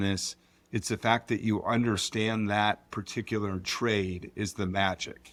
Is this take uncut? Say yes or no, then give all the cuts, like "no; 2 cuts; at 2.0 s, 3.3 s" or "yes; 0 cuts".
yes; 0 cuts